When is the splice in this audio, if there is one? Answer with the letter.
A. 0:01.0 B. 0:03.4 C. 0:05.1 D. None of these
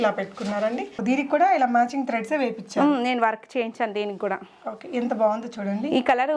A